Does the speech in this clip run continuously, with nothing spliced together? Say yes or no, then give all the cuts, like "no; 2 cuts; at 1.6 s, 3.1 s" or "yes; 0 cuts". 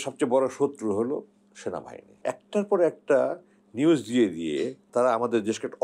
no; 2 cuts; at 2.2 s, 4.8 s